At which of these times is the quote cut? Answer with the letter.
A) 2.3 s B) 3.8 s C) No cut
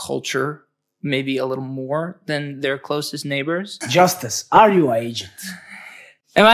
B